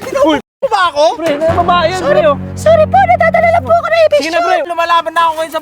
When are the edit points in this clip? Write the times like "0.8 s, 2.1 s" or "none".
4.7 s